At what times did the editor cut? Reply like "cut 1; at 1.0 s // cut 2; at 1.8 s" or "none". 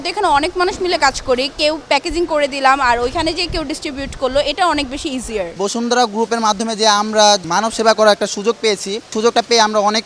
cut 1; at 5.5 s // cut 2; at 7.4 s // cut 3; at 9.1 s

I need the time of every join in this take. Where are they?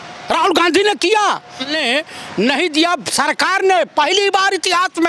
cut 1; at 1.7 s

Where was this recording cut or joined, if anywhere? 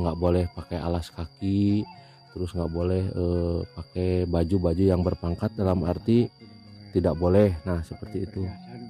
none

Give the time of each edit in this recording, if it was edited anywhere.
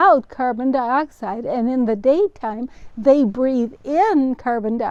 none

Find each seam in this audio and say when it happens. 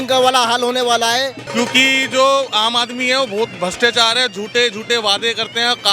cut 1; at 1.4 s

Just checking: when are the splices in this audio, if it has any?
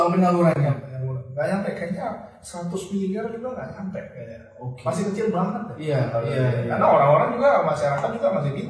none

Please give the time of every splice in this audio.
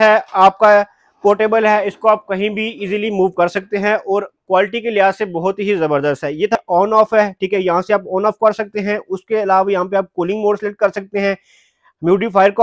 cut 1; at 6.6 s

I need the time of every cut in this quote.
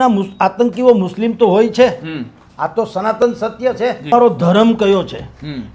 cut 1; at 4.1 s

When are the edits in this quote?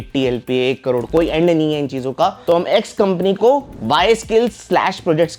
cut 1; at 2.4 s

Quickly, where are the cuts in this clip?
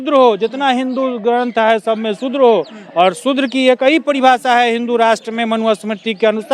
none

